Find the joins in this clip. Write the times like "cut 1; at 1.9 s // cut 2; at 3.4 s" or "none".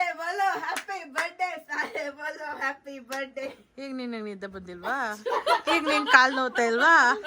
none

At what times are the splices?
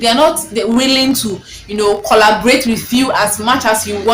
none

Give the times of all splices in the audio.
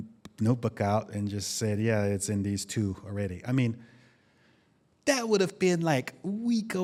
none

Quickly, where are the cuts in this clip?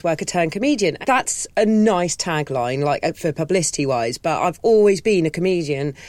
cut 1; at 1.0 s

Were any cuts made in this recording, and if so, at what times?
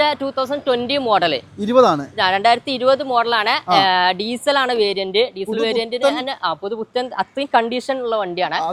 none

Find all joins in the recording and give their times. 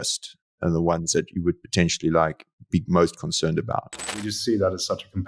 cut 1; at 4.2 s

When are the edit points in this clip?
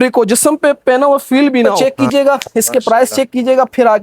cut 1; at 1.7 s

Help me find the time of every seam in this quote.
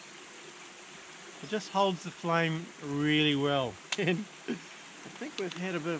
cut 1; at 3.8 s

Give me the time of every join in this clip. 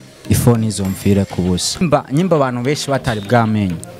cut 1; at 1.8 s

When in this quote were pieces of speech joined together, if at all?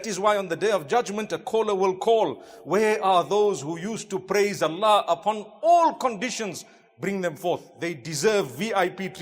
none

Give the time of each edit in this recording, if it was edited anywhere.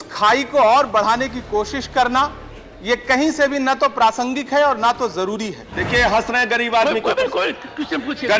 cut 1; at 5.7 s

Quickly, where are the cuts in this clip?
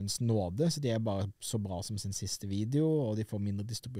none

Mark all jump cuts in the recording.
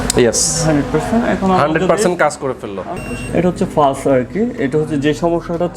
cut 1; at 3.0 s

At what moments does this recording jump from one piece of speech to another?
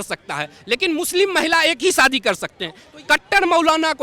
cut 1; at 2.9 s

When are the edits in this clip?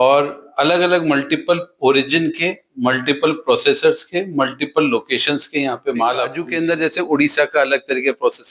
cut 1; at 6.4 s

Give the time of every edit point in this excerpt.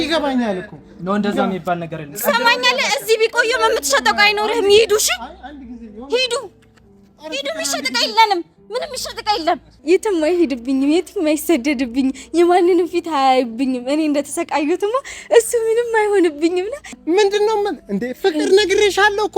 cut 1; at 9.7 s // cut 2; at 17.0 s

